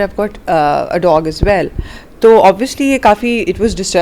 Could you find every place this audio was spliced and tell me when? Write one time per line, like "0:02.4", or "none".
none